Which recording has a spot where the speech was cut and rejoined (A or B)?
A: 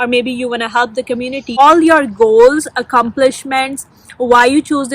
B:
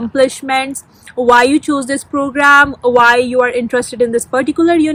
A